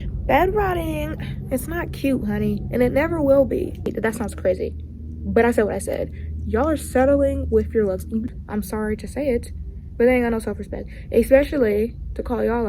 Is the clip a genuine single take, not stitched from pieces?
no; 2 cuts; at 3.9 s, 8.2 s

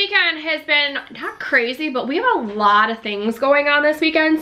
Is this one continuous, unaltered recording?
yes; 0 cuts

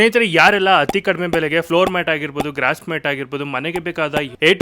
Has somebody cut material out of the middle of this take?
yes; 1 cut; at 1.7 s

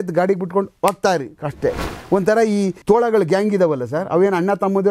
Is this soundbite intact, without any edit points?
no; 2 cuts; at 1.9 s, 2.8 s

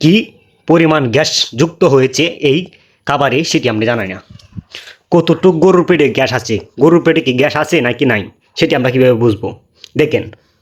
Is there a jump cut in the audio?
no; 0 cuts

